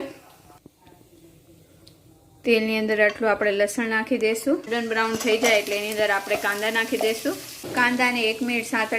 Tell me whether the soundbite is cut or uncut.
cut